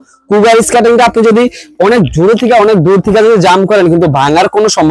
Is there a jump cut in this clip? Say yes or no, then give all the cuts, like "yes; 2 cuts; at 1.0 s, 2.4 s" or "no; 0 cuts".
no; 0 cuts